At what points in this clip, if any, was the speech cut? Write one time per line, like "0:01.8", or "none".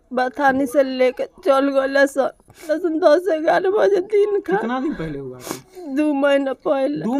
0:02.6